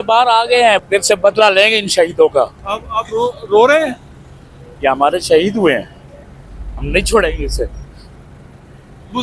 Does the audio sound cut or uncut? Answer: uncut